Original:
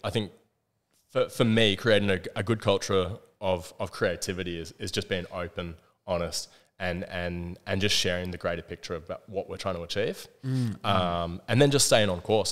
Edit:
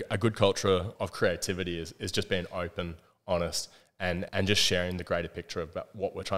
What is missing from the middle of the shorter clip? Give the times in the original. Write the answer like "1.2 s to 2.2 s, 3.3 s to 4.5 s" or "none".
3.2 s to 3.7 s, 7.1 s to 7.6 s